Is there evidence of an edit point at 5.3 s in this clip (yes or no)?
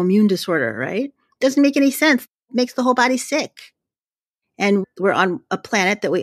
no